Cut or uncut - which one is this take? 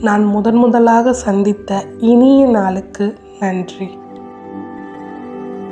uncut